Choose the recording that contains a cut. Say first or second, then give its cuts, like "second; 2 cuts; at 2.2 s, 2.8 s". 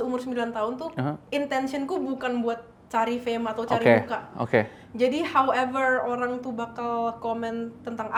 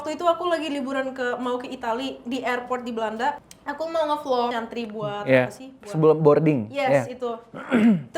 second; 2 cuts; at 3.5 s, 4.5 s